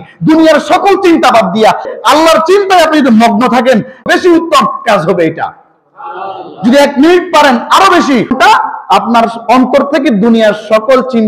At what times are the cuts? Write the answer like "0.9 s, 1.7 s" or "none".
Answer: 1.9 s, 4.0 s, 8.3 s